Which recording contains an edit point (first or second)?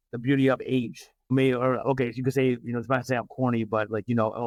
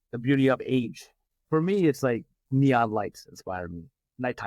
second